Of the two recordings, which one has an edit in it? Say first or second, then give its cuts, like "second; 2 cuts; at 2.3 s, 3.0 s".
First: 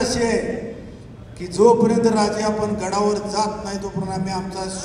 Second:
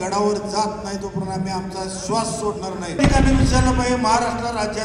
second; 1 cut; at 3.0 s